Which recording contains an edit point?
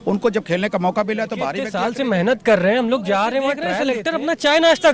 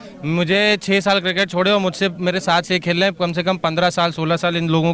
first; 2 cuts; at 1.7 s, 3.7 s

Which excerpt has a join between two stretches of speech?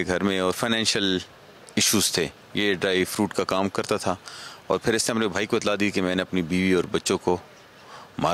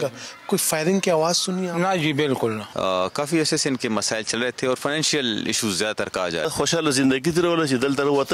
second; 2 cuts; at 2.7 s, 6.4 s

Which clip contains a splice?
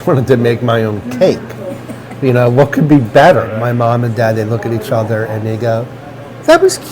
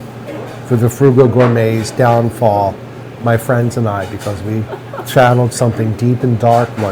first; 1 cut; at 3.5 s

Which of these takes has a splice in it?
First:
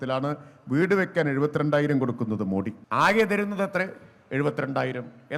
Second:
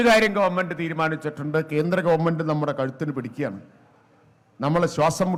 first; 1 cut; at 2.8 s

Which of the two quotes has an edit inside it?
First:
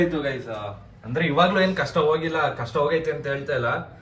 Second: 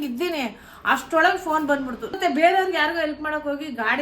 second; 1 cut; at 2.0 s

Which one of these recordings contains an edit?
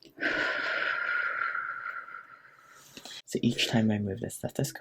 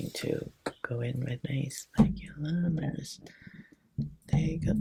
first; 1 cut; at 3.2 s

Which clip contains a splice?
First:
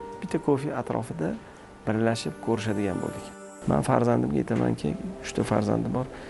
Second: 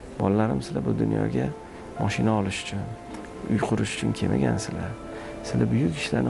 first; 1 cut; at 3.3 s

